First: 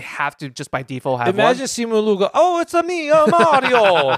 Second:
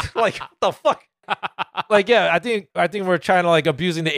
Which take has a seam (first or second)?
second